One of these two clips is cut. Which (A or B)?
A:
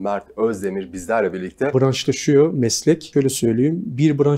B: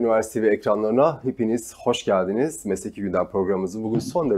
A